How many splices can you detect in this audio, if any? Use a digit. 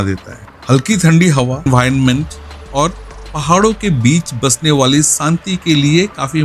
1